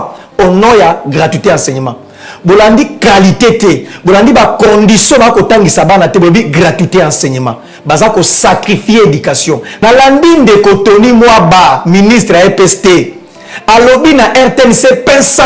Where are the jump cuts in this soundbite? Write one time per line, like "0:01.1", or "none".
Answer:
0:09.7

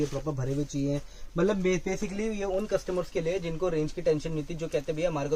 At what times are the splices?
none

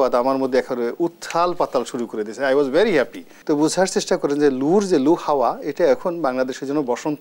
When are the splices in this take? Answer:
0:03.3

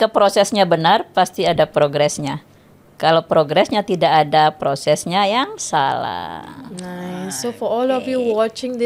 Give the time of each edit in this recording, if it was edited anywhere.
none

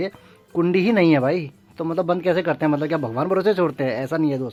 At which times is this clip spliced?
none

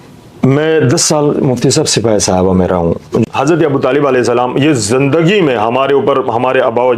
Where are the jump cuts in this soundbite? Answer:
0:03.3

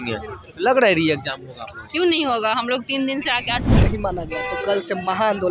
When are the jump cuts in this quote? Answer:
0:03.7

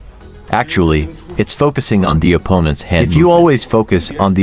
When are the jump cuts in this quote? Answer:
0:03.1

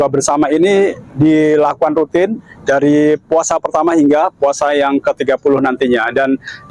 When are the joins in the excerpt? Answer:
none

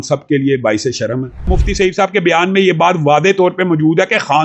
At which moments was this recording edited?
0:01.5

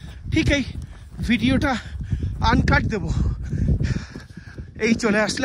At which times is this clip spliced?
none

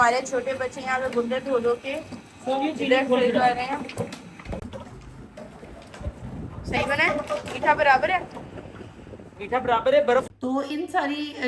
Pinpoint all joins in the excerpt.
0:04.7
0:10.3

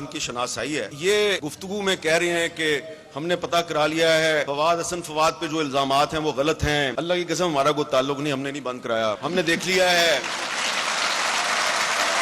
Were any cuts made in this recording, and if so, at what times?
0:00.9
0:01.5
0:04.5
0:06.9
0:09.2

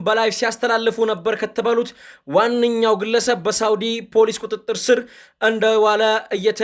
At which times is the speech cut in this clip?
none

